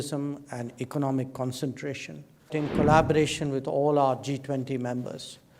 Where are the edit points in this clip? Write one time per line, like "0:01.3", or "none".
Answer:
0:02.5